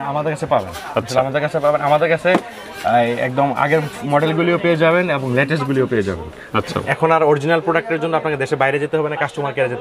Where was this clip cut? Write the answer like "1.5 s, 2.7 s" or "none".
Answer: 6.8 s